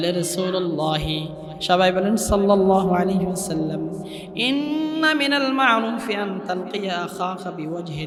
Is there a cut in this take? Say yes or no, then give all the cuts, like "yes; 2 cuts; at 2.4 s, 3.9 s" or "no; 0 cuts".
no; 0 cuts